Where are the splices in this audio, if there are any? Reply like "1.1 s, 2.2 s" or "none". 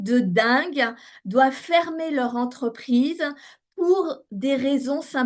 none